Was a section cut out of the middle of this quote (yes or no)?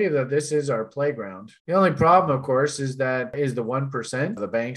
no